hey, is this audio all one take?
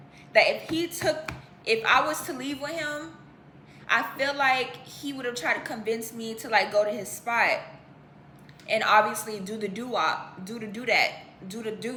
yes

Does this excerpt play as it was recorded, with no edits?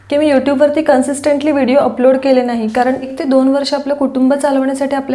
no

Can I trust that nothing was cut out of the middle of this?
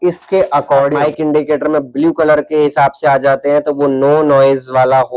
yes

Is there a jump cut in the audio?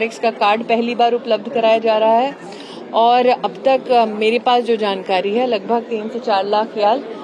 no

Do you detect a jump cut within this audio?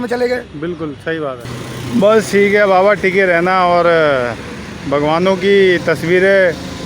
yes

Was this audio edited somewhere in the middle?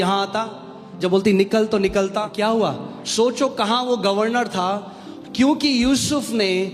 yes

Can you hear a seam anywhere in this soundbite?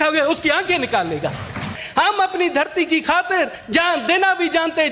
yes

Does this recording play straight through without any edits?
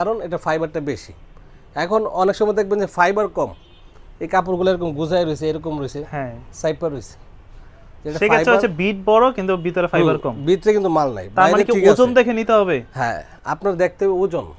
yes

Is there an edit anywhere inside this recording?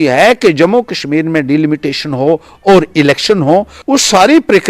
yes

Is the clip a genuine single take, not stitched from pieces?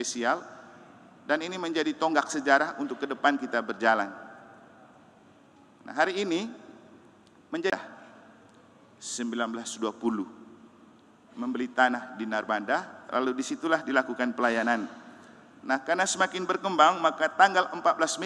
no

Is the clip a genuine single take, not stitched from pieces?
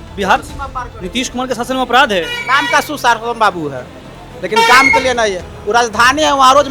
yes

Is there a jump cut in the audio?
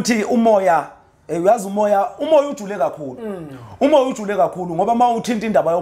no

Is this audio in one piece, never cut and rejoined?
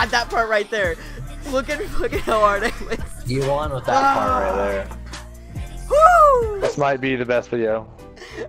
yes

